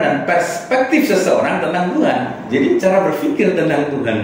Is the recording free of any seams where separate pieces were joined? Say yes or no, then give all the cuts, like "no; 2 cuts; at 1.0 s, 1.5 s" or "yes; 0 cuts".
no; 1 cut; at 2.4 s